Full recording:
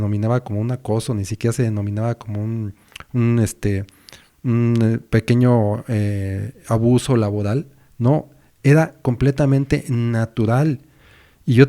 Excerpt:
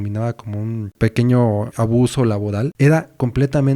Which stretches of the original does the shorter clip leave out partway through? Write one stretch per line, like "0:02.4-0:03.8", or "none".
0:02.7-0:05.0
0:05.8-0:06.6
0:07.6-0:08.6